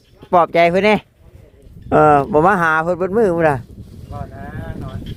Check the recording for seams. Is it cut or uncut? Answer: uncut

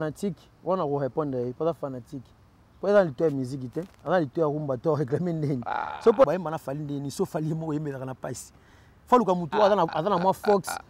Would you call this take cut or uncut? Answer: cut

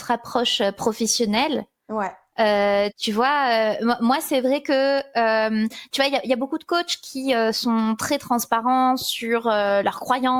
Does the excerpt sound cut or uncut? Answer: uncut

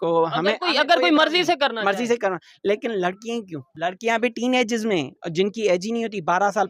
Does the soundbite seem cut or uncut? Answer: cut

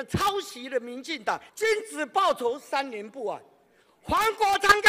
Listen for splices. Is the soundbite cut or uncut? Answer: cut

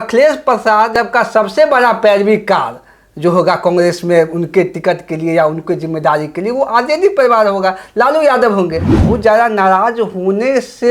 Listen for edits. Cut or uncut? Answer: cut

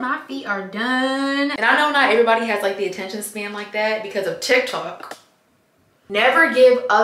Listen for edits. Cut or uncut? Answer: cut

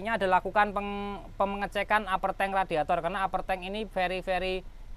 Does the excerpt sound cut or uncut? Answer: uncut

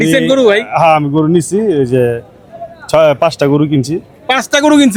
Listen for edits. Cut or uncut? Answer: uncut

